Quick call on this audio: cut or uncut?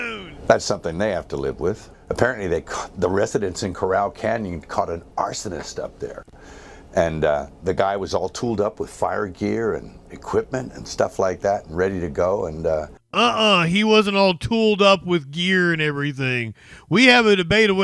cut